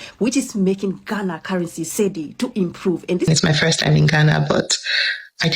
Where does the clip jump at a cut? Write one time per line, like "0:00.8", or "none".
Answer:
0:03.3